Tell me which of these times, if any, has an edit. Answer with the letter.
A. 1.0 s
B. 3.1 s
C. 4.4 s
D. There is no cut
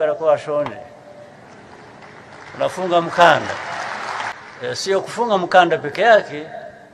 C